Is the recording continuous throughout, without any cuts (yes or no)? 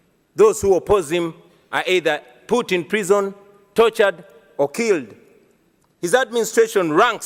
yes